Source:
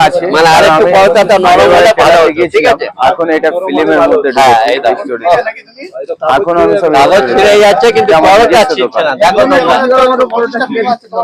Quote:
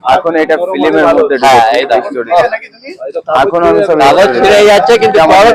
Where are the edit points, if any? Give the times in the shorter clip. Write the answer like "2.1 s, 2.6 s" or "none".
none